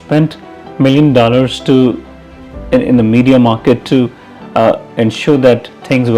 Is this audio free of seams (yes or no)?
yes